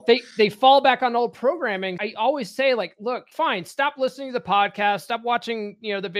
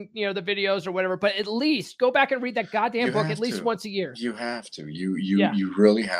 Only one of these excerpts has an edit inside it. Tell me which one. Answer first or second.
first